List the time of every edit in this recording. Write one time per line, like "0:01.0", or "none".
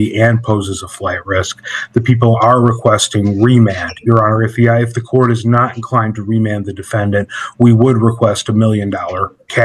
none